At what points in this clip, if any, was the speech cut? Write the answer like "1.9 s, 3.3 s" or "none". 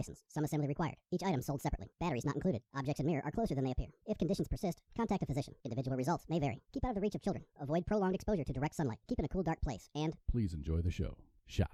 none